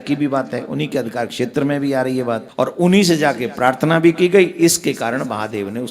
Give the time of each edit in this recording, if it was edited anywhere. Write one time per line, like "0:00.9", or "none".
0:02.5